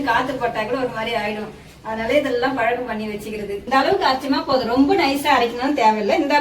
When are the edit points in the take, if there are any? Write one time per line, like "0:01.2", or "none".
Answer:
0:03.6